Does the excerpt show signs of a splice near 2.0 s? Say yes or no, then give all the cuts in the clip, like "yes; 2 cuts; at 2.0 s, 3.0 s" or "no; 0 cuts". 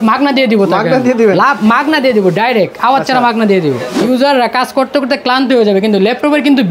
no; 1 cut; at 3.9 s